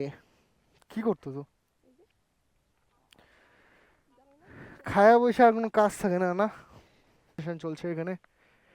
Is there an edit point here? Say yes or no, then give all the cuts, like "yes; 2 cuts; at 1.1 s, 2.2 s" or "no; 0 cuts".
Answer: yes; 1 cut; at 7.4 s